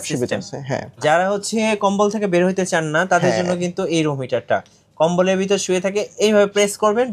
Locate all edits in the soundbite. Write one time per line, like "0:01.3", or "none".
0:01.0